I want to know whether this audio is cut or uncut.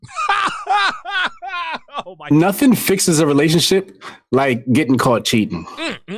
cut